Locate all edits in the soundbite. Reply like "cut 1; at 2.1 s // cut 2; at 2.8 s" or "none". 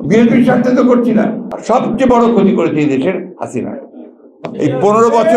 cut 1; at 1.5 s